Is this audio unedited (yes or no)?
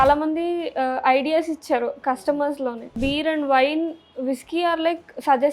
no